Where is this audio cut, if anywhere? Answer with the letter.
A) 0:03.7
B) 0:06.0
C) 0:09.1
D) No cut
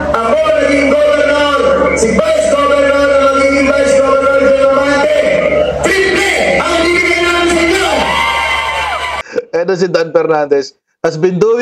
C